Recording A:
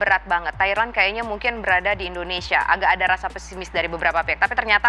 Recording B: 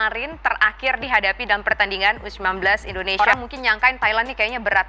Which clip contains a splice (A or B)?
B